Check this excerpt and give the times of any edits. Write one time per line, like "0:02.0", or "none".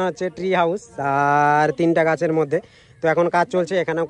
none